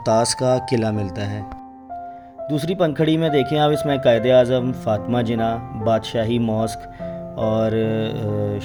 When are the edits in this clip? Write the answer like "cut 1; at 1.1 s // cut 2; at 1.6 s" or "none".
none